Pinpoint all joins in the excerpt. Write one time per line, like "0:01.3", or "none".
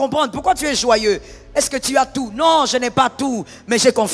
none